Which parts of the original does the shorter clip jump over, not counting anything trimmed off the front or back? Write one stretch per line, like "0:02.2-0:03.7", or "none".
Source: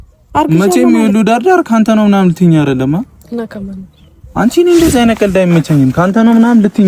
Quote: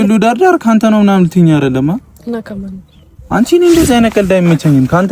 none

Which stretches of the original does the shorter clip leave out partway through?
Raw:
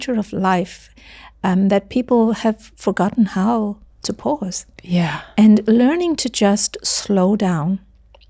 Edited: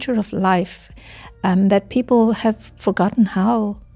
none

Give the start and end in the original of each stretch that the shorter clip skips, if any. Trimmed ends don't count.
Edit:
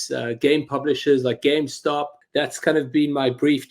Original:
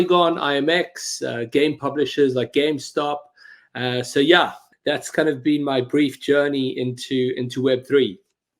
0:03.3-0:04.7

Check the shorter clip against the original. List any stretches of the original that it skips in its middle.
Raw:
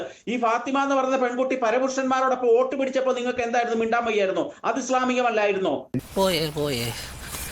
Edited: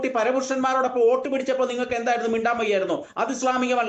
none

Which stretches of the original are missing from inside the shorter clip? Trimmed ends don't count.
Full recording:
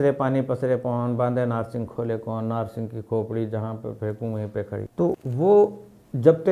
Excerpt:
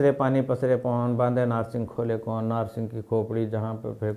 none

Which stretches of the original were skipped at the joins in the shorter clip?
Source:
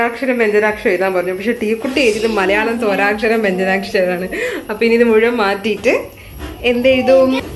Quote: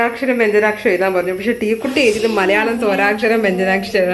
none

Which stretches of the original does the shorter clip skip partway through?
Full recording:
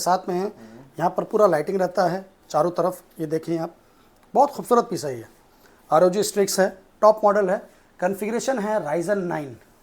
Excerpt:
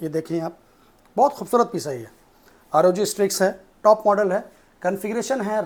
none

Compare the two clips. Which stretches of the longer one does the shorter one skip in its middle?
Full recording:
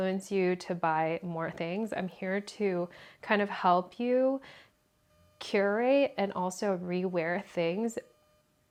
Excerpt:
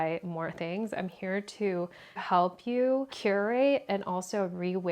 0:03.2-0:03.5
0:04.4-0:05.4

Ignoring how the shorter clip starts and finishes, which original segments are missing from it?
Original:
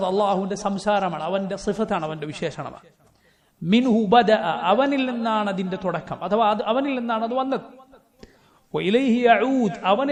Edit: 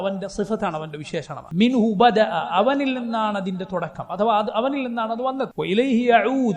0:02.7-0:03.5
0:07.6-0:08.7

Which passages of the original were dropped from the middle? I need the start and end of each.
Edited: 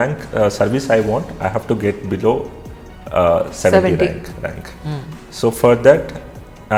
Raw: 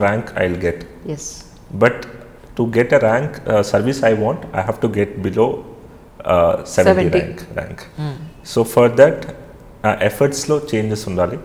none

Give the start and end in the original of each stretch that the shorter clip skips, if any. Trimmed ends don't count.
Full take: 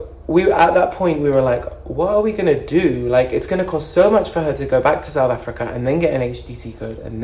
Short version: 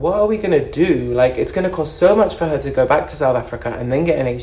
none

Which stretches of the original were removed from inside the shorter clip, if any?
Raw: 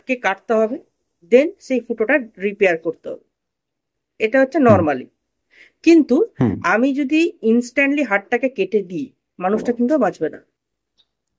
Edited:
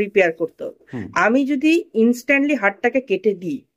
0:03.6-0:06.6

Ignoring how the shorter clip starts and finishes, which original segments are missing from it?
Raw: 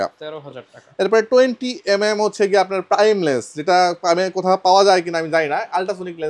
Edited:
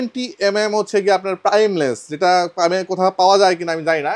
none

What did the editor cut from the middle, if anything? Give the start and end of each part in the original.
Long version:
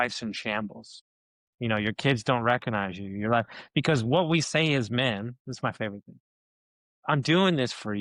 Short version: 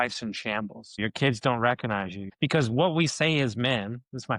0:01.0-0:01.8
0:03.1-0:03.6

